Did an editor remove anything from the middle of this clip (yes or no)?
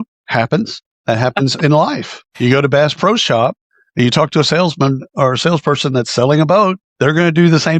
no